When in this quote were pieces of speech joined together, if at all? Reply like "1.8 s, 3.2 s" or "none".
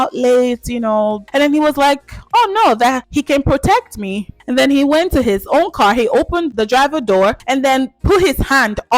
3.0 s, 4.3 s, 7.4 s